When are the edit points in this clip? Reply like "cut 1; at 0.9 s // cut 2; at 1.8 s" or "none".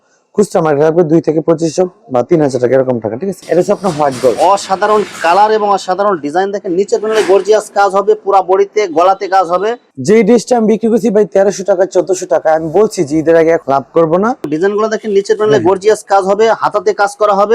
cut 1; at 3.3 s // cut 2; at 9.8 s // cut 3; at 14.5 s

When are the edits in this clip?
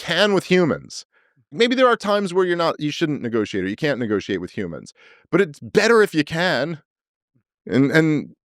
cut 1; at 1.5 s

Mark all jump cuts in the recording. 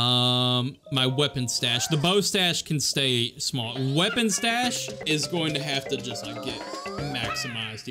cut 1; at 5.0 s

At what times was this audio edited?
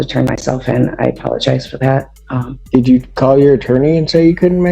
cut 1; at 2.5 s

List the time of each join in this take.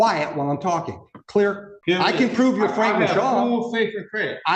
cut 1; at 1.7 s

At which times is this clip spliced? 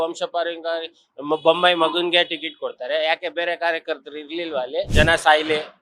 cut 1; at 4.9 s

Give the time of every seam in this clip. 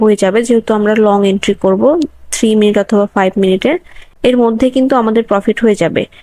none

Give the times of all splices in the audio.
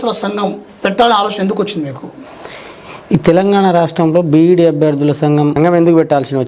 cut 1; at 5.5 s

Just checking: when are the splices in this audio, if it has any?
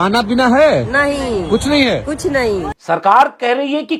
none

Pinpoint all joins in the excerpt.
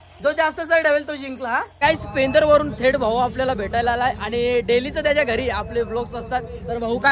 cut 1; at 1.7 s

